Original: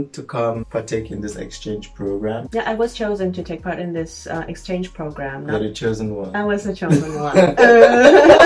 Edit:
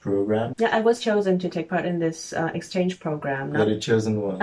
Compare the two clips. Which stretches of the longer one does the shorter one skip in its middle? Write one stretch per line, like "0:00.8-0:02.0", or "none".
none